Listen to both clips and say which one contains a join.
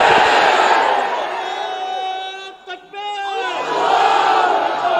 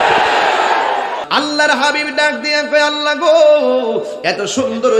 second; 1 cut; at 1.2 s

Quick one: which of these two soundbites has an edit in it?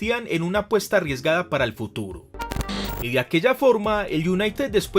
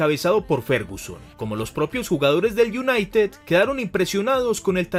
first; 1 cut; at 2.5 s

